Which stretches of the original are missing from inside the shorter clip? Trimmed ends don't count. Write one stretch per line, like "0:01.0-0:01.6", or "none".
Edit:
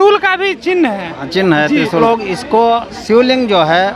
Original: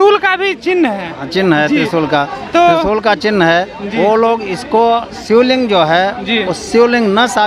0:02.0-0:04.2